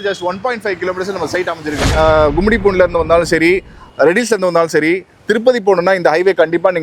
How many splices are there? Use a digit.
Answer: 1